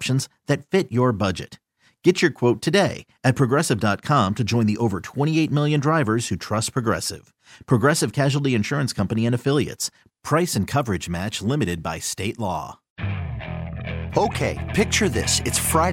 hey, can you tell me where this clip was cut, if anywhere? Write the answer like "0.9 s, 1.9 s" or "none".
12.8 s